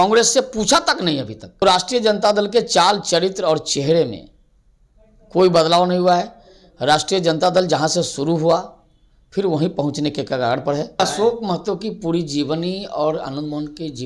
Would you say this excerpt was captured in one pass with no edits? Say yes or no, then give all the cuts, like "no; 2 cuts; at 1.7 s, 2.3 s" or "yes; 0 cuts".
no; 2 cuts; at 1.6 s, 11.0 s